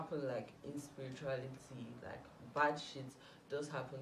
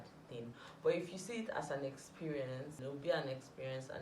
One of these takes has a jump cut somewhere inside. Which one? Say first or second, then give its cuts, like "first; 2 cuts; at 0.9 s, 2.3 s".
second; 1 cut; at 2.8 s